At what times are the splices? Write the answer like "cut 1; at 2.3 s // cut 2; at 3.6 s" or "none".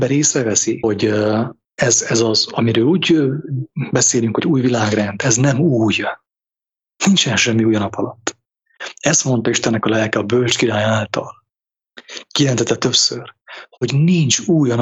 cut 1; at 0.8 s // cut 2; at 1.6 s